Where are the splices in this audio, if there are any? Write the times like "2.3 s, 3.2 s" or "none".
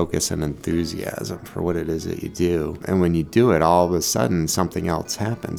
2.8 s